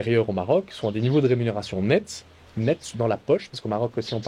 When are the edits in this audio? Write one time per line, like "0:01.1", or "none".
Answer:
none